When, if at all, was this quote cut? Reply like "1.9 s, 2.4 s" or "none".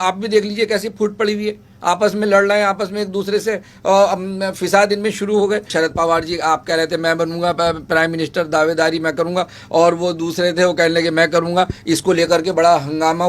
5.7 s